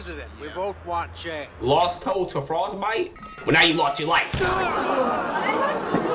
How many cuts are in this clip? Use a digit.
1